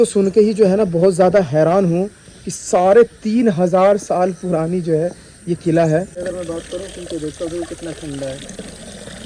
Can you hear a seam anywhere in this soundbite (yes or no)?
yes